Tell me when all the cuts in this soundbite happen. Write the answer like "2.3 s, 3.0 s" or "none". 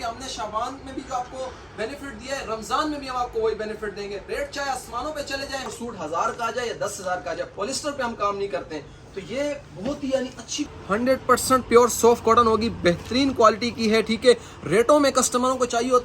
5.7 s, 10.7 s